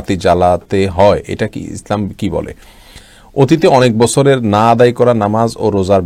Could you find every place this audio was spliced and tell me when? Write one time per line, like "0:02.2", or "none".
0:03.0